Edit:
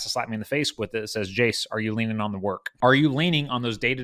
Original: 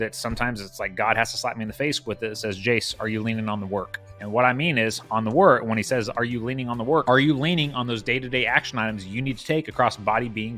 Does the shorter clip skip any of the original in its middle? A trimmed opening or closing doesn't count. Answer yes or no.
yes